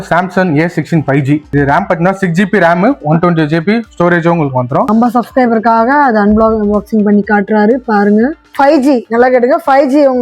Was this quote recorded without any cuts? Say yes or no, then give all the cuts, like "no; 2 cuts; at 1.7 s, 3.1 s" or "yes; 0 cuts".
no; 3 cuts; at 1.5 s, 4.9 s, 8.5 s